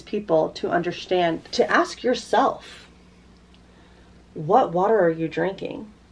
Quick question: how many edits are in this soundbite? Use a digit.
1